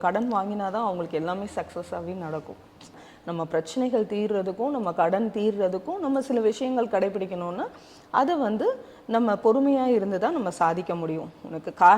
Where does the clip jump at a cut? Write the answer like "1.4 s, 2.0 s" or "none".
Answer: 3.1 s

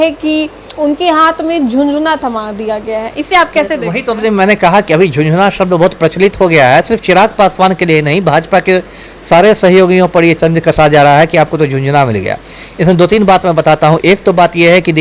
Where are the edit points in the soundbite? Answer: none

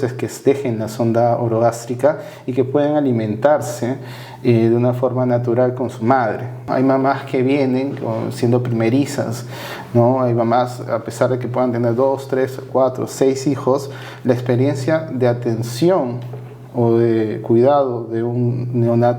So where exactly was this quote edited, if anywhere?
6.6 s

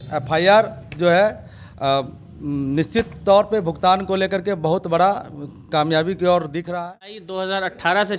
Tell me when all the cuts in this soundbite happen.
7.3 s

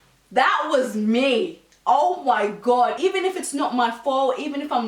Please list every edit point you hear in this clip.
3.0 s

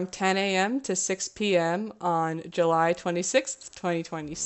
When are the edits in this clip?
none

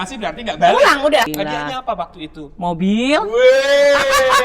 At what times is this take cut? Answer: 1.3 s

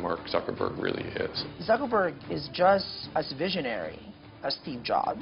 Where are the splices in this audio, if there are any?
1.4 s, 3.0 s

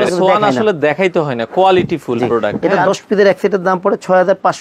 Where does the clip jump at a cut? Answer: 2.5 s

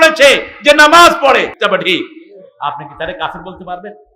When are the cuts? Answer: 1.5 s

